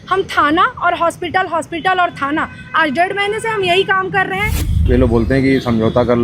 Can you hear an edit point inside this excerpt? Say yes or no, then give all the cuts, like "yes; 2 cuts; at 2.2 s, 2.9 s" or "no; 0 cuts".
yes; 1 cut; at 4.9 s